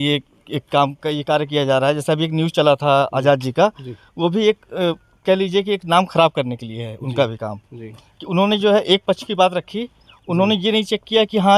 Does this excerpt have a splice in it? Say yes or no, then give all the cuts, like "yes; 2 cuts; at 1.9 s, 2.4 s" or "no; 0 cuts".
no; 0 cuts